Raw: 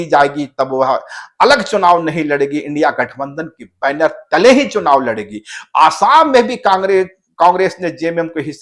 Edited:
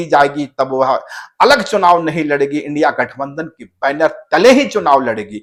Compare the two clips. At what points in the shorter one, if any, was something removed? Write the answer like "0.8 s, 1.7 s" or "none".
none